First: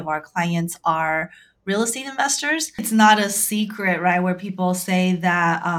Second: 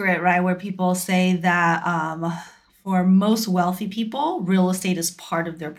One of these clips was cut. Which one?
first; 1 cut; at 2.8 s

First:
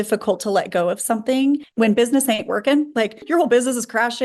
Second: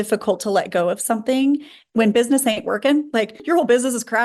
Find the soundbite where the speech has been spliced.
first; 1 cut; at 1.7 s

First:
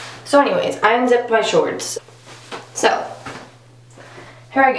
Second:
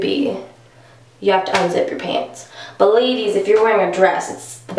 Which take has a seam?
first; 1 cut; at 1.9 s

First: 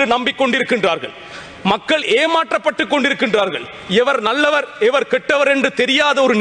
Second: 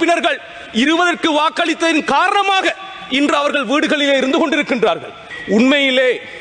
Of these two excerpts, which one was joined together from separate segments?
second; 1 cut; at 5.2 s

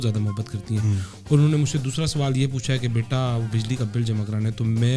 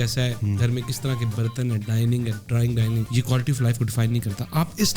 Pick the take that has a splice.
second; 1 cut; at 3.1 s

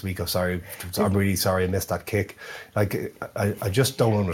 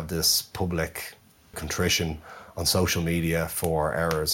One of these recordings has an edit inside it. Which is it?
second; 1 cut; at 1.6 s

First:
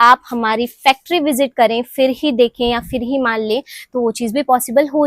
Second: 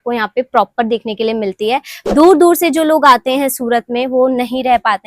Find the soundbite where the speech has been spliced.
second; 1 cut; at 2.0 s

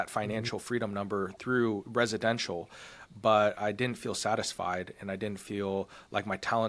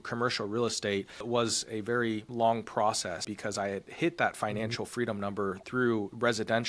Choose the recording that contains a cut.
second; 3 cuts; at 1.2 s, 2.3 s, 3.3 s

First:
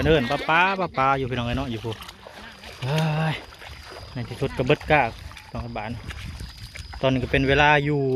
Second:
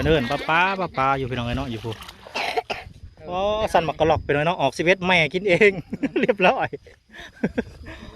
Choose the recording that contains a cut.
second; 1 cut; at 2.2 s

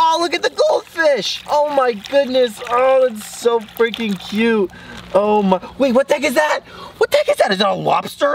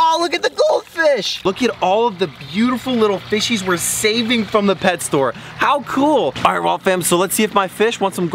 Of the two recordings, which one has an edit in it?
second; 2 cuts; at 1.4 s, 6.3 s

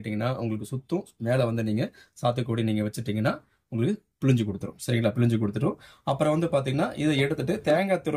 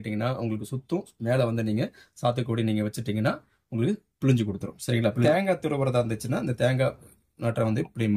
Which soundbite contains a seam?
second; 1 cut; at 5.2 s

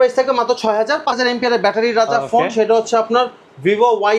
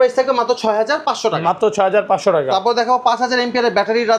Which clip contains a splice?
first; 1 cut; at 1.2 s

